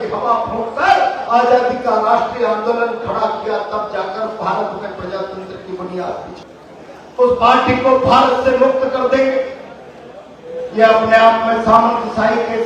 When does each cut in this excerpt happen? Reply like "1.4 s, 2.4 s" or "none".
6.5 s